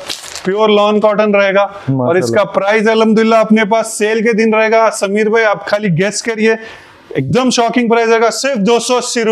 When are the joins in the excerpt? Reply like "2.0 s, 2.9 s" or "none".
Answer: none